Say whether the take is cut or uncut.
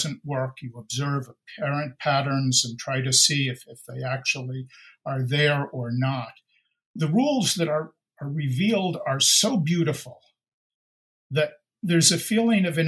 cut